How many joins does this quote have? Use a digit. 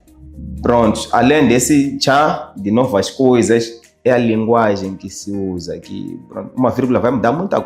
0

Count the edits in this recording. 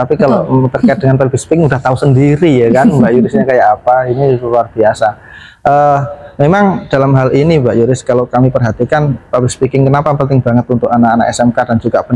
0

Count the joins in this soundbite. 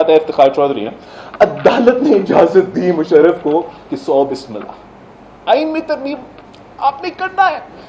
0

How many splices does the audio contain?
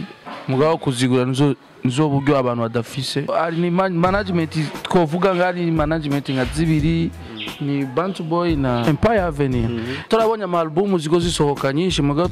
3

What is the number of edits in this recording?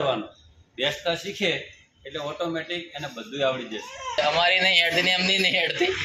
1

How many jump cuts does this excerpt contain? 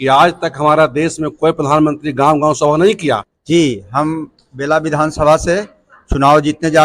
1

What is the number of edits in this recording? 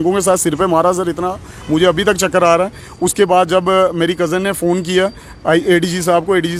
0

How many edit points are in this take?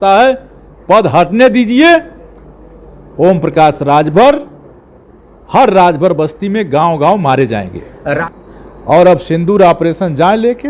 1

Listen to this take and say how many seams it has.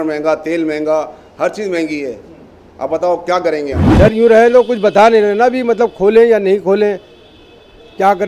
1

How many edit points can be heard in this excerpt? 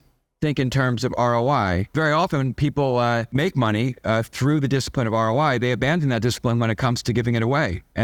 2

